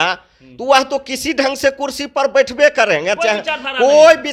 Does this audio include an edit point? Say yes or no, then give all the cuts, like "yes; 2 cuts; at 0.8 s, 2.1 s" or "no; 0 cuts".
no; 0 cuts